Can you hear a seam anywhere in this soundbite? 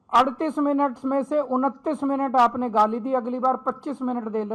no; 0 cuts

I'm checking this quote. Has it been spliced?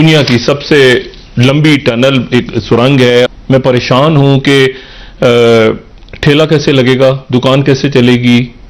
yes; 1 cut; at 3.3 s

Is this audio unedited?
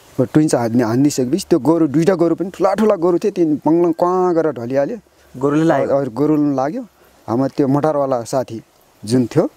yes; 0 cuts

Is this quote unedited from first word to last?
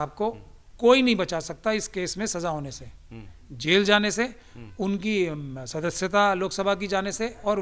yes; 0 cuts

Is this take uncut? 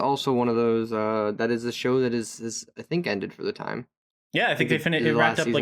yes; 0 cuts

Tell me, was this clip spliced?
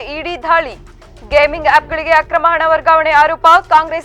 no; 0 cuts

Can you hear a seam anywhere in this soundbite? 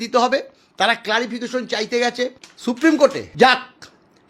yes; 2 cuts; at 2.5 s, 3.2 s

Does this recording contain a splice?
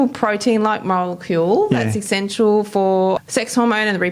yes; 1 cut; at 3.2 s

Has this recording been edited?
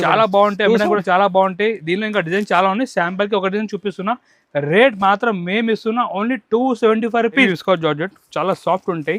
yes; 1 cut; at 7.5 s

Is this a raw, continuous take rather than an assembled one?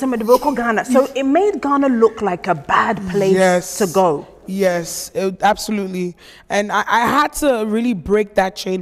yes; 0 cuts

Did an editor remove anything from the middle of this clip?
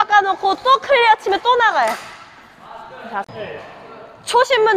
yes; 1 cut; at 3.3 s

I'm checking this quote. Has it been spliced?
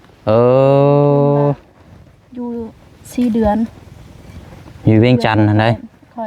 no; 0 cuts

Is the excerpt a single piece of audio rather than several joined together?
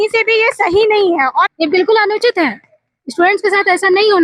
no; 1 cut; at 1.5 s

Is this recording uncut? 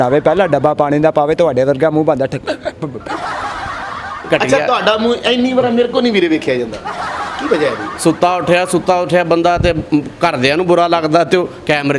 no; 2 cuts; at 4.2 s, 7.9 s

